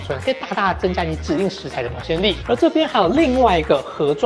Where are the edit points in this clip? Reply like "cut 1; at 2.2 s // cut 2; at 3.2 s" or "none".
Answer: cut 1; at 2.4 s